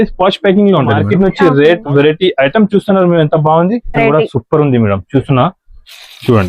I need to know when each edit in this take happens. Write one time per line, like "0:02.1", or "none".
0:01.1
0:04.0